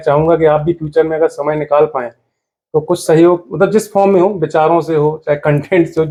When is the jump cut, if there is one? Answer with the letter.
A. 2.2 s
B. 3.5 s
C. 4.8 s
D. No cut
D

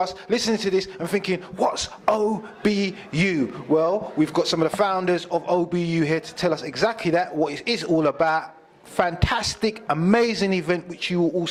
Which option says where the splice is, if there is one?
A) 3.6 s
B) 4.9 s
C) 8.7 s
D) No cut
D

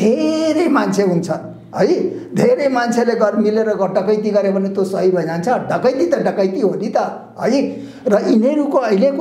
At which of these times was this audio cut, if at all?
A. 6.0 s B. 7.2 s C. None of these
C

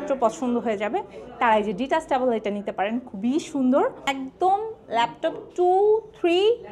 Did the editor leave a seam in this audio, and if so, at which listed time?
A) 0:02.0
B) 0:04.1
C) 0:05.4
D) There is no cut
B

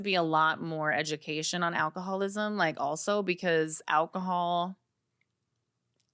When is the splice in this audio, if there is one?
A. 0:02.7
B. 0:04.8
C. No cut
C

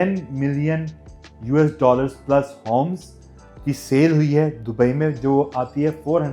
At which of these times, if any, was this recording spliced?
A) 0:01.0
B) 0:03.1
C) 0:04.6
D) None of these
D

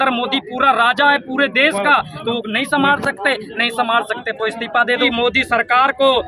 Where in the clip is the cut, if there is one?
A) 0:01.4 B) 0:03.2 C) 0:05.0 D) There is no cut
C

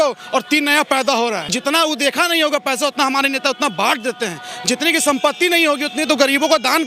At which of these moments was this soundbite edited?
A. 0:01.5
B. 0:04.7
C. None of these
A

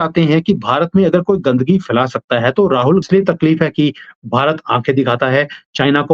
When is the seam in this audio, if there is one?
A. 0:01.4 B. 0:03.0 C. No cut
B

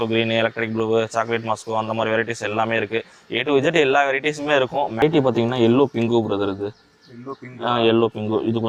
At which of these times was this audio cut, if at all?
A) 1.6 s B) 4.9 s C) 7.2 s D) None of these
D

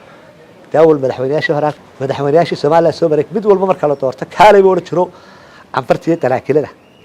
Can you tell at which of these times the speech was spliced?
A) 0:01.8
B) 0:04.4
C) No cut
A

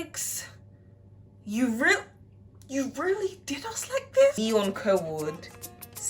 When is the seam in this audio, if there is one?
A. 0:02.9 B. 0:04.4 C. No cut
B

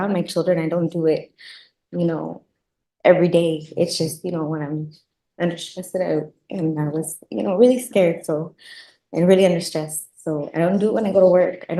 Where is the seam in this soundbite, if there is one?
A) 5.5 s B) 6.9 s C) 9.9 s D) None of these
D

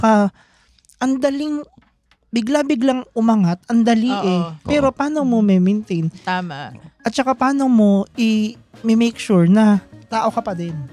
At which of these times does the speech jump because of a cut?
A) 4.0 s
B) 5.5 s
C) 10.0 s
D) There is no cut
C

